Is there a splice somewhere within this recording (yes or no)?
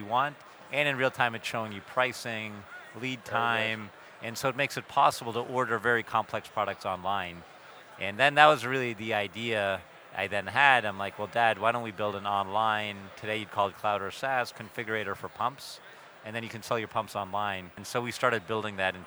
yes